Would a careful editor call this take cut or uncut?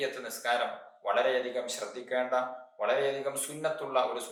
uncut